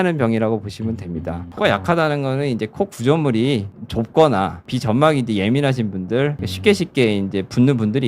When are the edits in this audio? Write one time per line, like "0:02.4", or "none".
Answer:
0:01.4